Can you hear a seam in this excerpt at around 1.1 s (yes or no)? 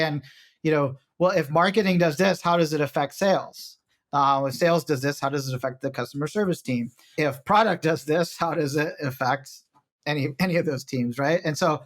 no